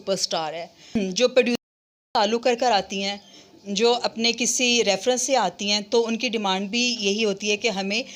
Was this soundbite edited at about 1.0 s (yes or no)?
yes